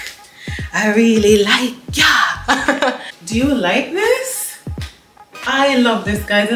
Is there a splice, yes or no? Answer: no